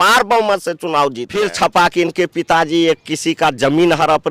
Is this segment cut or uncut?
cut